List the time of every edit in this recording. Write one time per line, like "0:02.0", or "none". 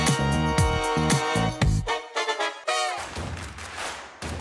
0:03.0